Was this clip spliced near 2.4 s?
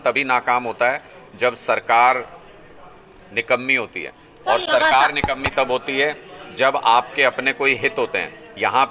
no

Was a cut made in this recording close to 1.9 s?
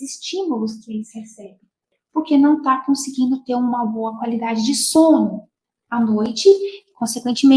yes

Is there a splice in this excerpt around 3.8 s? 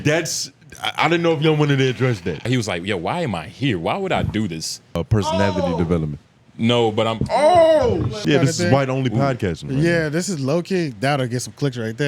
no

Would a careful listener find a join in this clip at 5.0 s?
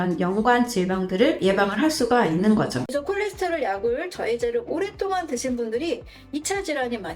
no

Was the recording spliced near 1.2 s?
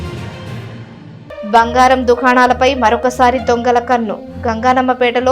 yes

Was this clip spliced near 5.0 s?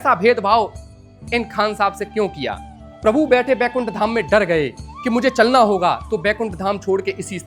no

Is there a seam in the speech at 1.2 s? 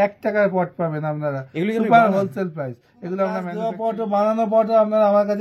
no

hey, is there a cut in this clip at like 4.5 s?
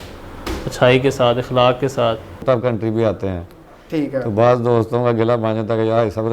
no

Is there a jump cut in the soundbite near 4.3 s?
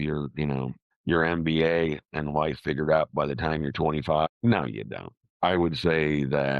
yes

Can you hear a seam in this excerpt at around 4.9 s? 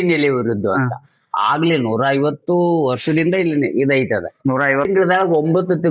yes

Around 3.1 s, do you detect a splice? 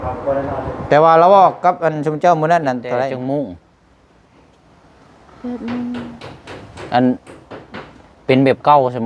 yes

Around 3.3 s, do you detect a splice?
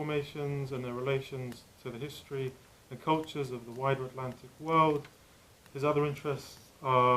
no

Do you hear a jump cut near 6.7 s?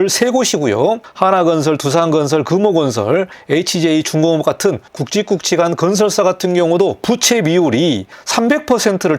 no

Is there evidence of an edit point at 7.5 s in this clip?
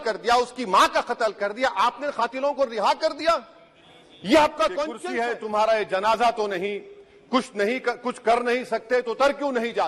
no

